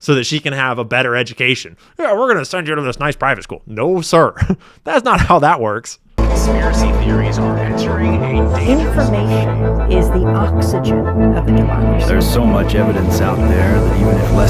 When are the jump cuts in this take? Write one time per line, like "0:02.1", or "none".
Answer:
0:06.0

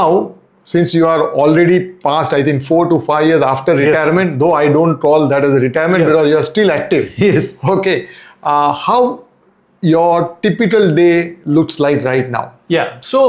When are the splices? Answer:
none

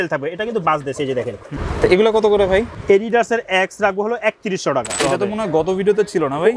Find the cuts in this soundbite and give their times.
0:01.5
0:02.7
0:05.0

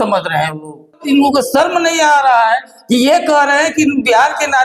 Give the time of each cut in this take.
0:01.0

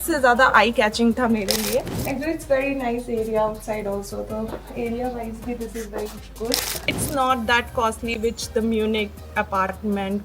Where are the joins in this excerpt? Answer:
0:02.0
0:07.0

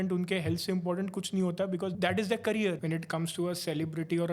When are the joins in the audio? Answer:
0:01.9
0:02.8

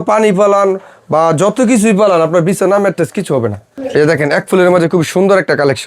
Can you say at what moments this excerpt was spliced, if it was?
0:03.7

